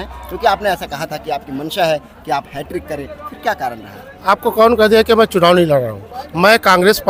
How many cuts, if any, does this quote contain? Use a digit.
0